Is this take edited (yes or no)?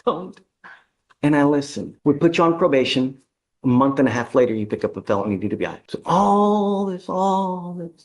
yes